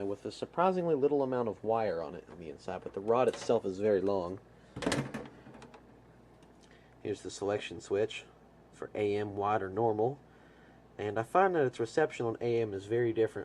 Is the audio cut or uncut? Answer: cut